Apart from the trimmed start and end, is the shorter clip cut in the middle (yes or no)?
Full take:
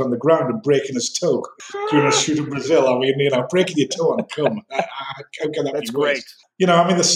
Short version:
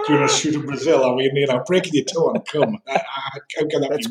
no